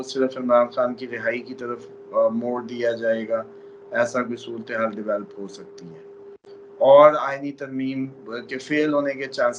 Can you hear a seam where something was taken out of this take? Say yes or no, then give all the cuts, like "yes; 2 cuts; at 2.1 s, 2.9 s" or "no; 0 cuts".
no; 0 cuts